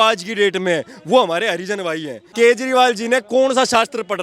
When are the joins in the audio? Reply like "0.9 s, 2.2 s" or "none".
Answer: 2.3 s